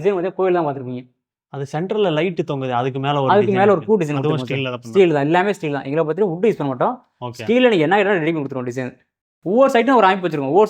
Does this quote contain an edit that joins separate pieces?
yes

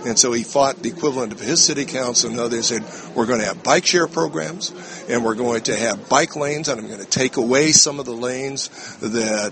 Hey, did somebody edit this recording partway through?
no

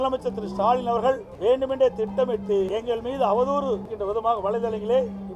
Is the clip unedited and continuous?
no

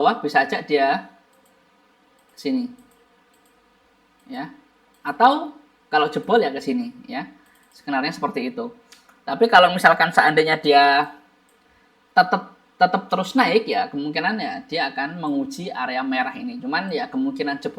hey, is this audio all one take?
yes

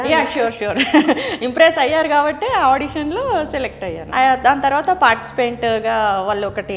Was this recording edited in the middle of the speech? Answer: yes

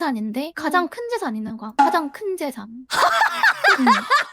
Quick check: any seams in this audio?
yes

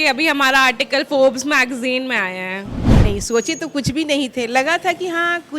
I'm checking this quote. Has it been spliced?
yes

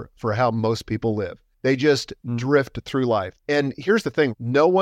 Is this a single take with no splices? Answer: no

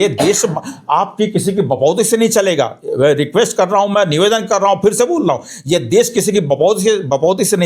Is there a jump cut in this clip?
no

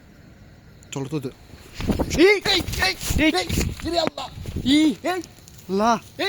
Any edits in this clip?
yes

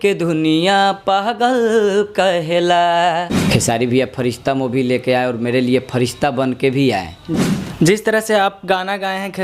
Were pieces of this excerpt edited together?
yes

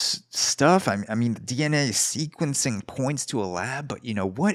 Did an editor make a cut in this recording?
no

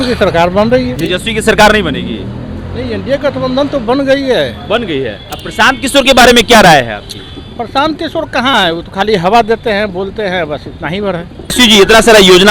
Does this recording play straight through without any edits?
no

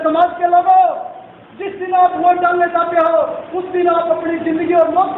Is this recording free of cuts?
yes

